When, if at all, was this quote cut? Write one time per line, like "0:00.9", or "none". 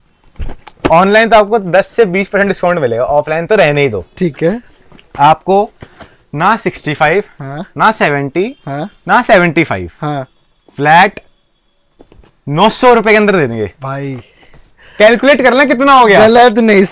none